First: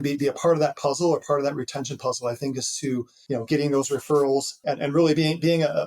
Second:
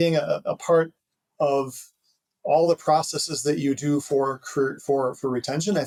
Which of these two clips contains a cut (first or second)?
first